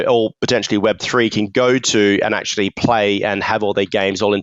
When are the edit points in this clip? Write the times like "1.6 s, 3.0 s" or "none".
none